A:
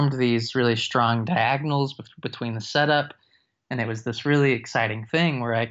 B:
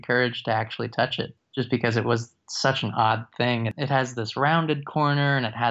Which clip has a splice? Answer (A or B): B